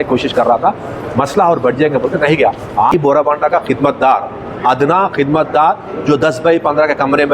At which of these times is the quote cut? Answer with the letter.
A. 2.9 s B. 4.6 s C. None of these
A